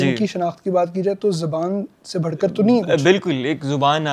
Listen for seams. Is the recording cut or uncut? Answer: uncut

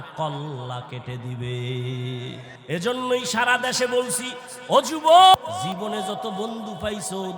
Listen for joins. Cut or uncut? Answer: cut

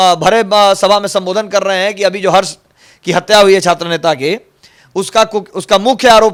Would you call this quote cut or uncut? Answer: uncut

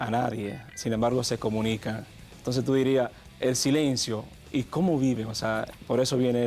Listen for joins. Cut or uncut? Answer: cut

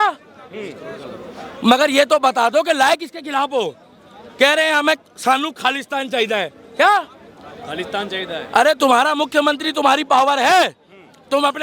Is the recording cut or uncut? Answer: uncut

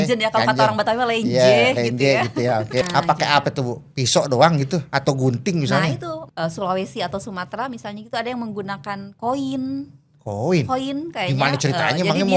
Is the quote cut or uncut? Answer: cut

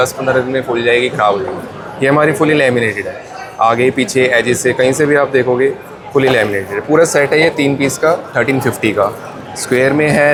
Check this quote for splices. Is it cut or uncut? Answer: uncut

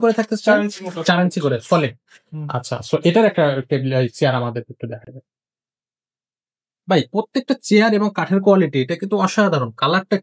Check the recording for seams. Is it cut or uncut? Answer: uncut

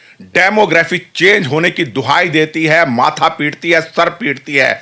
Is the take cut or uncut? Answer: uncut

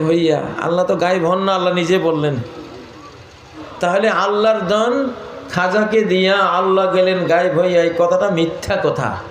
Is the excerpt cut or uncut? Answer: cut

